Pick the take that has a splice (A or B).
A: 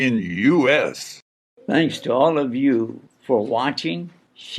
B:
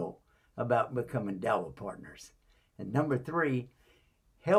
A